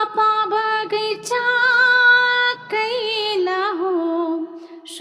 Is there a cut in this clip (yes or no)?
no